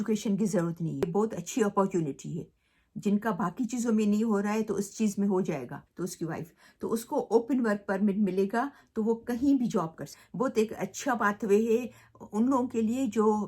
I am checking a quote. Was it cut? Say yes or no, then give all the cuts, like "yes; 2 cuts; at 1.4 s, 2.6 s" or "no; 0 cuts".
yes; 3 cuts; at 1.0 s, 5.8 s, 10.2 s